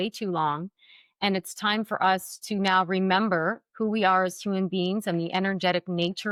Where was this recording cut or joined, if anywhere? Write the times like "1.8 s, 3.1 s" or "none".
none